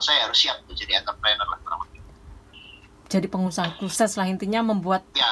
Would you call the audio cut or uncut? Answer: uncut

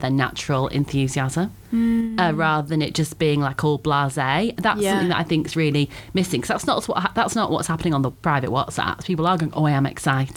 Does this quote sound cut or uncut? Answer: uncut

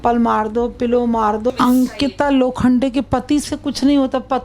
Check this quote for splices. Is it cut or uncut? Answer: cut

